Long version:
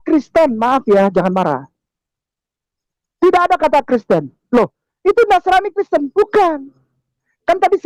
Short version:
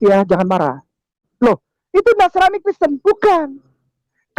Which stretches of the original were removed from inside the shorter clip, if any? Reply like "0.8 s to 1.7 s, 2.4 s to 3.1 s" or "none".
2.1 s to 4.4 s